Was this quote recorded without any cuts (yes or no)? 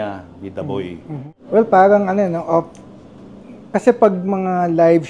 no